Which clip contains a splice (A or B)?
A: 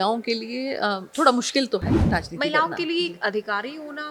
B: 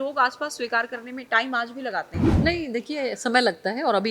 B